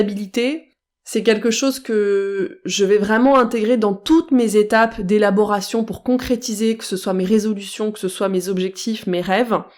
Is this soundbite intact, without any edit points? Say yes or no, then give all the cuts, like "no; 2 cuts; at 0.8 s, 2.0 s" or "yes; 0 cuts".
yes; 0 cuts